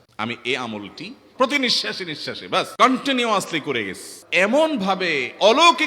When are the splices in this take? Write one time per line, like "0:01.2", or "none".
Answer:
0:01.2
0:02.7
0:04.1